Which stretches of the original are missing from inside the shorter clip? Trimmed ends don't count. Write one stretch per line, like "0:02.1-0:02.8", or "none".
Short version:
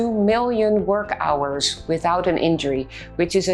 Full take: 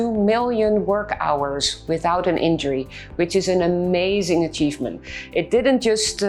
none